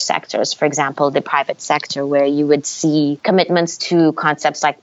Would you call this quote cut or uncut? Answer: cut